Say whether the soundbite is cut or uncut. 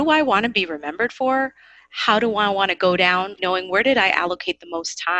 uncut